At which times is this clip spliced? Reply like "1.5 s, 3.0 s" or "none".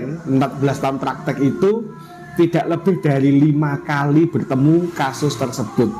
none